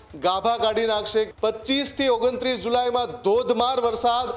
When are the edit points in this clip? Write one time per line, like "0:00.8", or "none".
0:01.3